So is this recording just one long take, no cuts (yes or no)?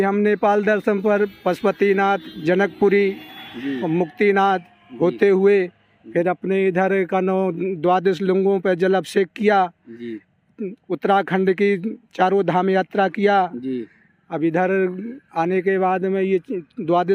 yes